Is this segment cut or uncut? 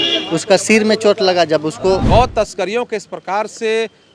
cut